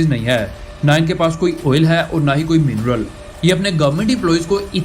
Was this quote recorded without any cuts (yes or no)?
no